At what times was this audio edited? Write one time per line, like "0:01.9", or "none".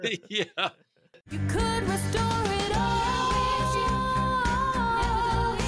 0:01.3